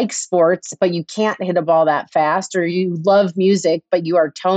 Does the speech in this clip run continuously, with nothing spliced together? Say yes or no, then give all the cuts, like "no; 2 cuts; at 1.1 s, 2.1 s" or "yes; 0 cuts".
yes; 0 cuts